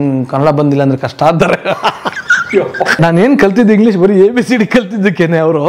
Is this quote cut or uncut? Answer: cut